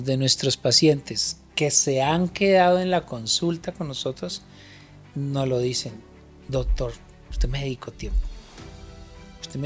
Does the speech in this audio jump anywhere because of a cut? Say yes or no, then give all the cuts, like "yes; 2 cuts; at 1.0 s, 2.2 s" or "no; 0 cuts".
no; 0 cuts